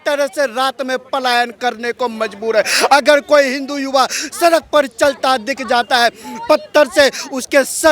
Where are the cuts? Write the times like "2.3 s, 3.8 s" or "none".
none